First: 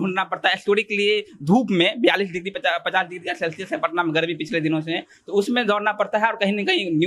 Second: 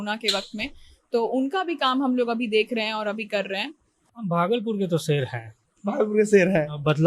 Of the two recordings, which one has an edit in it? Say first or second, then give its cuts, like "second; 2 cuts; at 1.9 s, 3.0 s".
second; 1 cut; at 4.1 s